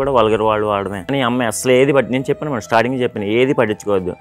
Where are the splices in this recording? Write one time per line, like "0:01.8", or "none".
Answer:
0:01.0